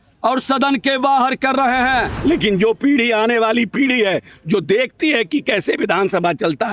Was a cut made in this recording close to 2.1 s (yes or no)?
yes